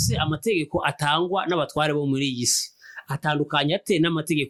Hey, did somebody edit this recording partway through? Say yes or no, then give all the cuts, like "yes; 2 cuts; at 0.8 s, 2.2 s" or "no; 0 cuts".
no; 0 cuts